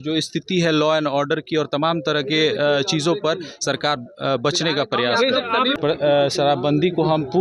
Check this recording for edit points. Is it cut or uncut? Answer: cut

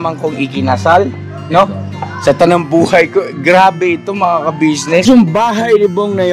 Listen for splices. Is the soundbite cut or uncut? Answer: cut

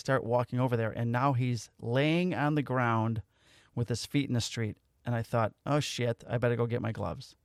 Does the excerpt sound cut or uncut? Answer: uncut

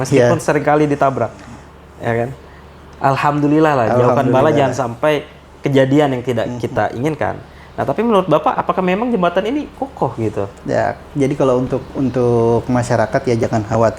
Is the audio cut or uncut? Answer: uncut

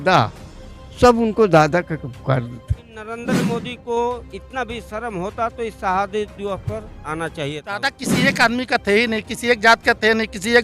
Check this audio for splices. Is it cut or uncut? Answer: cut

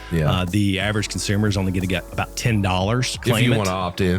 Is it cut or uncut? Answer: cut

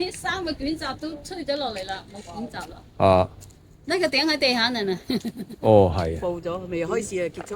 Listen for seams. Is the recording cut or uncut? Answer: cut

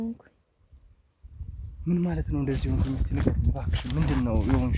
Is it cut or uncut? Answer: uncut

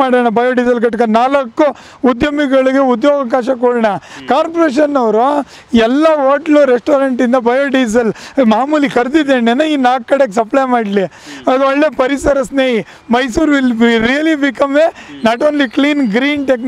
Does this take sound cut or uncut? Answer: uncut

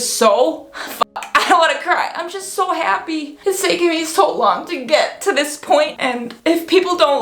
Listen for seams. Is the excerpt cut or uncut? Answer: cut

